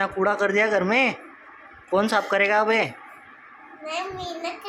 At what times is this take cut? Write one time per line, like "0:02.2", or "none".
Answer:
none

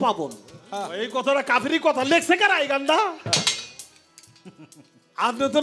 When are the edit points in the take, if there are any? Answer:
0:00.9

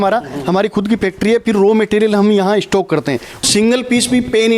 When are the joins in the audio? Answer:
0:03.4

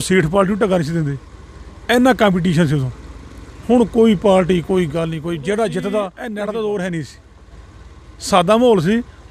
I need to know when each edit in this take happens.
0:06.2

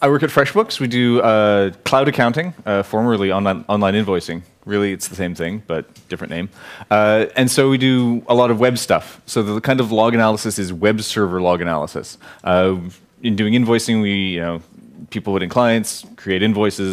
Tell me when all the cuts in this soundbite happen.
0:10.4

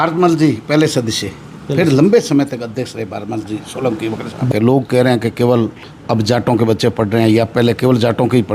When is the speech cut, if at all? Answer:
0:04.4

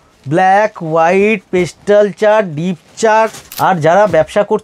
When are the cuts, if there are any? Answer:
0:03.4

